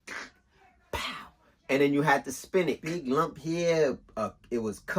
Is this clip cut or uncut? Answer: cut